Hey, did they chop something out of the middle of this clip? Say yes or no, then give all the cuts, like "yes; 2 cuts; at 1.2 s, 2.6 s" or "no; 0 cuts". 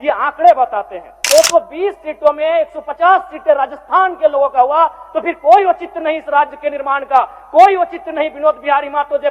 yes; 1 cut; at 1.2 s